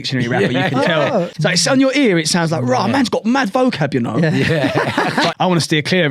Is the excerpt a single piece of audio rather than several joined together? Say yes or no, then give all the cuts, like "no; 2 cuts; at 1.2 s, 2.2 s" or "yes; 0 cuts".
no; 2 cuts; at 1.3 s, 5.3 s